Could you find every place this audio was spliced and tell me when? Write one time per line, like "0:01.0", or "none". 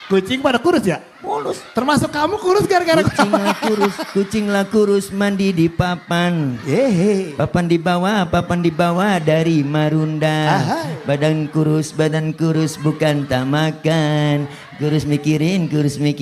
none